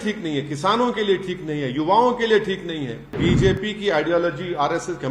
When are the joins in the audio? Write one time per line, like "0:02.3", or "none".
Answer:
0:03.2